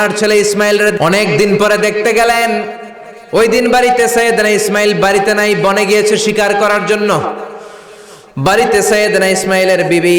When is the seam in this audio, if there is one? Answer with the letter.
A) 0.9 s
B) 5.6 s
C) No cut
A